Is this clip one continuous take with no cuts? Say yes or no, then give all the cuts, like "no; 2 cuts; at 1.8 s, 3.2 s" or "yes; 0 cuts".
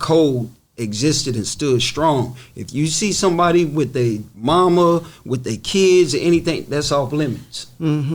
yes; 0 cuts